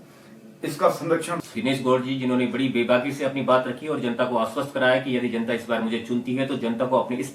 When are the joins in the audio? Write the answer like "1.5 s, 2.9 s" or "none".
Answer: 1.5 s